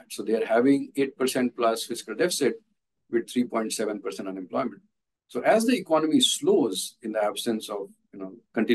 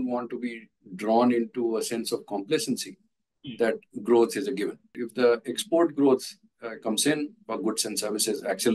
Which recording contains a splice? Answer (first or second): second